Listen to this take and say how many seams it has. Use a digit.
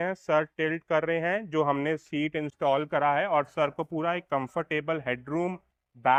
0